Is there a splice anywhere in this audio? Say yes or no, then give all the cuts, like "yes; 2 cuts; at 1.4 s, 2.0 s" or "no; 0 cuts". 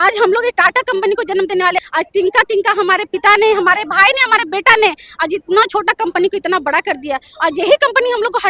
yes; 1 cut; at 1.8 s